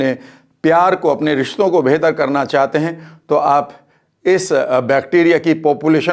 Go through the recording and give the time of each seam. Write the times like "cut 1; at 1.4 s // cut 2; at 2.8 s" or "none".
none